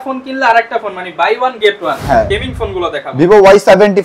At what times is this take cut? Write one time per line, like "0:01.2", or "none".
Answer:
0:02.3